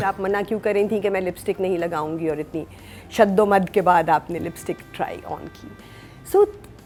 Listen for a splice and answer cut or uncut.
uncut